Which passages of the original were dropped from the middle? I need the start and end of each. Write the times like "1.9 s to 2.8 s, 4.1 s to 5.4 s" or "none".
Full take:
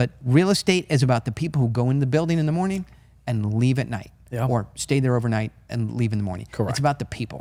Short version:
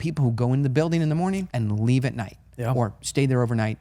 2.9 s to 3.2 s